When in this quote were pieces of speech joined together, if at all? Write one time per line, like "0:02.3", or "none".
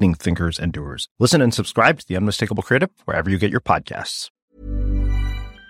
0:04.2